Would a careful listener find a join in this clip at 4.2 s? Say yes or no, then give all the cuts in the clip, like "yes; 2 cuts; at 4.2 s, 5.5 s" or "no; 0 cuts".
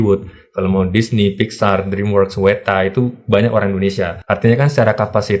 yes; 1 cut; at 4.2 s